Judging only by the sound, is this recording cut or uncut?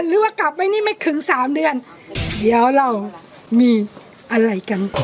uncut